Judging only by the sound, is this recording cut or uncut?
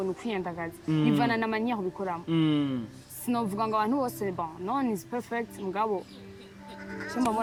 uncut